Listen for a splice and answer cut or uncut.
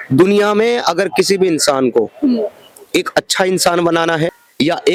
uncut